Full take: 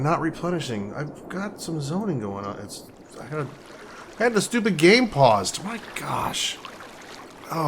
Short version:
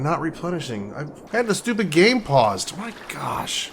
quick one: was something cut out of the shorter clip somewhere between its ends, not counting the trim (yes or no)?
yes